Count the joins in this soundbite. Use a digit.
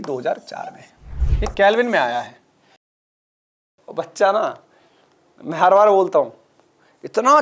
1